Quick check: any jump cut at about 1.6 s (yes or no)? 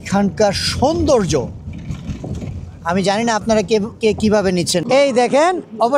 no